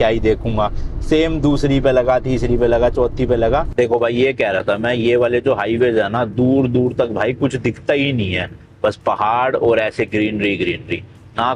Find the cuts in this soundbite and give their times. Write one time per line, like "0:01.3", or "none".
0:03.7